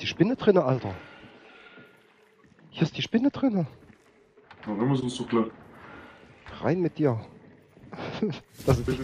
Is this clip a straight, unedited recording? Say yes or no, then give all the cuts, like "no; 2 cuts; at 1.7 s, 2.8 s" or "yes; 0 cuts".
yes; 0 cuts